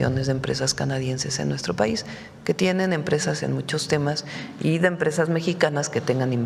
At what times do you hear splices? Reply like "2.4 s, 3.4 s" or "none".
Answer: none